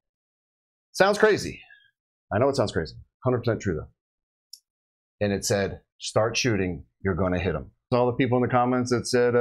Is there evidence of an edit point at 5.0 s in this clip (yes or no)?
no